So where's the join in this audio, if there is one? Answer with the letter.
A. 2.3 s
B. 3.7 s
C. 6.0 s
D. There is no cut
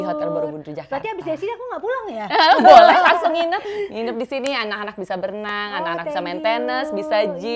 B